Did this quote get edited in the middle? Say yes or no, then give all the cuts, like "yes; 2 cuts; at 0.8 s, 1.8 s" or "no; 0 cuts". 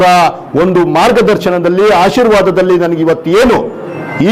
no; 0 cuts